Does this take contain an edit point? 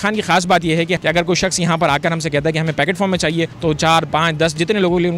yes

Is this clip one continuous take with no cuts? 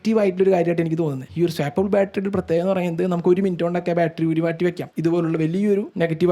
no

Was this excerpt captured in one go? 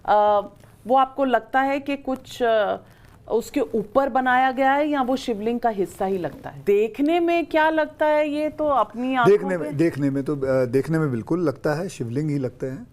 no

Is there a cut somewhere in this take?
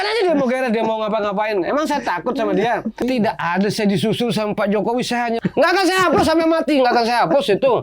yes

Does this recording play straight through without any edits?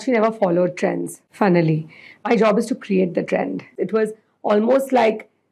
no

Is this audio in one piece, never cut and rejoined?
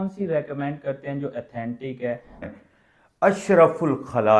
no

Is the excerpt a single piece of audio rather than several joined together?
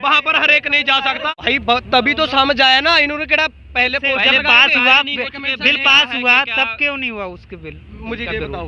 no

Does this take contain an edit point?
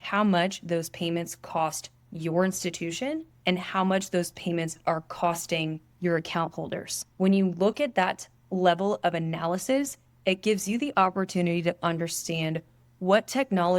yes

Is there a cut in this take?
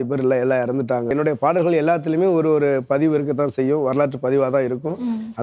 yes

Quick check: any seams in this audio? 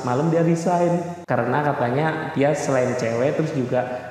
yes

